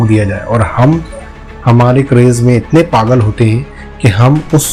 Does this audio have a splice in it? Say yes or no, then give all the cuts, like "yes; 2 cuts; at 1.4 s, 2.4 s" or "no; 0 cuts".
no; 0 cuts